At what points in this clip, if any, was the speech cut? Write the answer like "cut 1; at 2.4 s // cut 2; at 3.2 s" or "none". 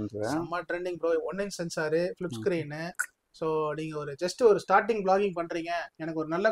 none